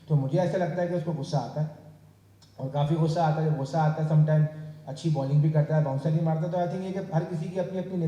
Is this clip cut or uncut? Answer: uncut